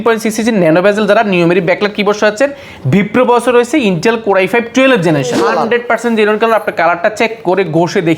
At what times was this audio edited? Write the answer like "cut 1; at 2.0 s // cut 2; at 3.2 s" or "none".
cut 1; at 5.4 s